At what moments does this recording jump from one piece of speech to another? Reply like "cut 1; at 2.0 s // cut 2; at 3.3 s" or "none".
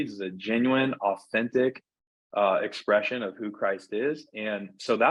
none